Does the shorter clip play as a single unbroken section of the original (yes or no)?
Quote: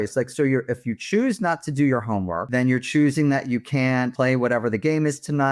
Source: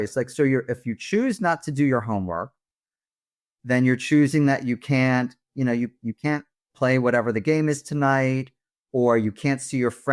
no